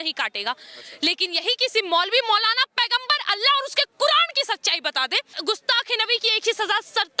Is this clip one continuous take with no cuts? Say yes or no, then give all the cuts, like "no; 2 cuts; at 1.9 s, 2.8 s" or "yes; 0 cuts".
no; 1 cut; at 5.3 s